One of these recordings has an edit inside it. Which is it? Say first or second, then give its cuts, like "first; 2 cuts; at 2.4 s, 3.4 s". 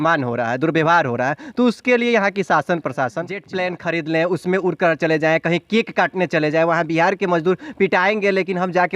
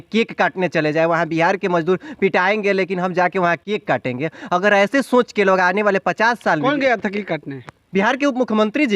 first; 1 cut; at 3.4 s